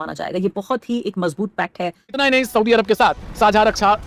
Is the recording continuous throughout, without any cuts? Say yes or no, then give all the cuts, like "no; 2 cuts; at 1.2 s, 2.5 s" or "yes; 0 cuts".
no; 1 cut; at 2.2 s